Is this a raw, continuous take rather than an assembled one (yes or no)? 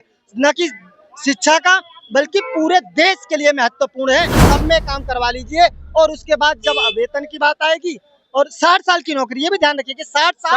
no